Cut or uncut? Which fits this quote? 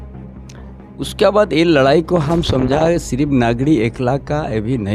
uncut